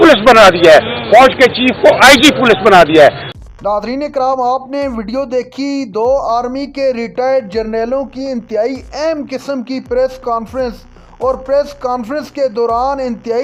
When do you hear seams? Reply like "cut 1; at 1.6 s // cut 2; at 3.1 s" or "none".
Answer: none